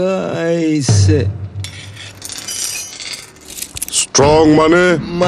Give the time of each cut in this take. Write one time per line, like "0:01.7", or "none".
0:03.0